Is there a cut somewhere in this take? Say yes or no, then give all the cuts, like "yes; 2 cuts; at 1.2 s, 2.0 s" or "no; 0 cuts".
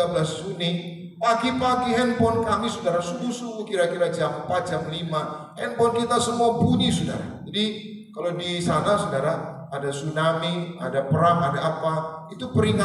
no; 0 cuts